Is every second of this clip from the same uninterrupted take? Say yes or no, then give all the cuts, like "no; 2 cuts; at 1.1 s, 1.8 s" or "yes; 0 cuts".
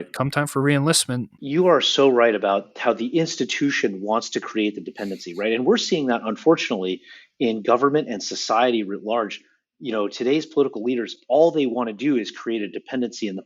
no; 1 cut; at 1.3 s